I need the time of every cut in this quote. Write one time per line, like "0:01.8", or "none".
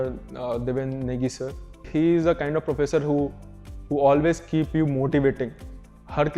0:01.8